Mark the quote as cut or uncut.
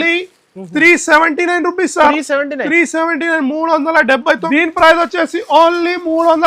cut